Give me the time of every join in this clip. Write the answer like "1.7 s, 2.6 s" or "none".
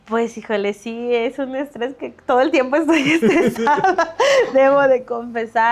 none